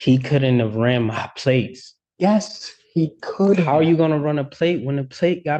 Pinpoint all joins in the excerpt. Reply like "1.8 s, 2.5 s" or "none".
none

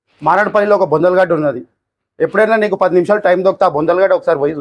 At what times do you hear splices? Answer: none

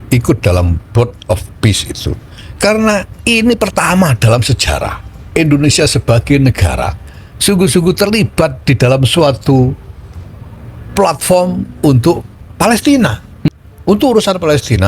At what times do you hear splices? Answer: 13.5 s

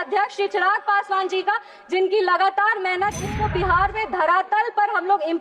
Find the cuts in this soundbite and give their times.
3.3 s

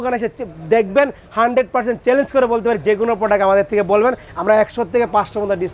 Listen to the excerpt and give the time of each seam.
none

